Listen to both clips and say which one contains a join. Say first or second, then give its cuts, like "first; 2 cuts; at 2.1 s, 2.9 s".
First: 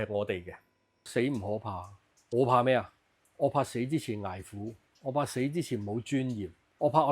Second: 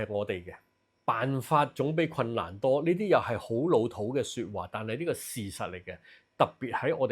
first; 1 cut; at 1.0 s